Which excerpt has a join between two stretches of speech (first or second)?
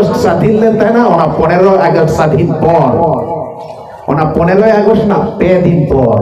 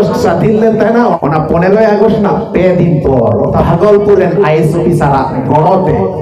second